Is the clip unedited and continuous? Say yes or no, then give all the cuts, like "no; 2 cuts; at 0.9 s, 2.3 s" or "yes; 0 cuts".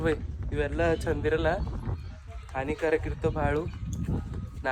yes; 0 cuts